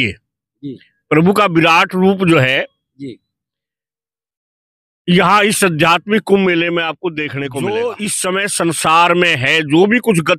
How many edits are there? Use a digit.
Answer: 1